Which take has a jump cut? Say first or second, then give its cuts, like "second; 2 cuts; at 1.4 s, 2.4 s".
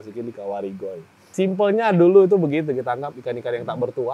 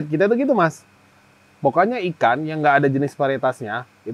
first; 1 cut; at 1.3 s